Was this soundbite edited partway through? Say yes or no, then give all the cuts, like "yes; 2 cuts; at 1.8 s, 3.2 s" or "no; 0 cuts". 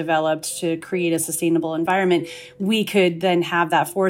yes; 1 cut; at 1.8 s